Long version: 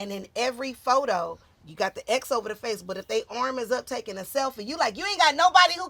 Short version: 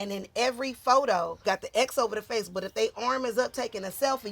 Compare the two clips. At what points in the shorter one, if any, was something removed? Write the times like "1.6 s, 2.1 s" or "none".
1.3 s